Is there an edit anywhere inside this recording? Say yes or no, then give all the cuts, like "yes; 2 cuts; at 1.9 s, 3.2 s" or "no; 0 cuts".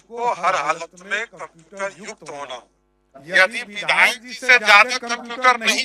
yes; 1 cut; at 3.1 s